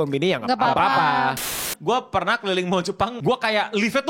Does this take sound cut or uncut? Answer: cut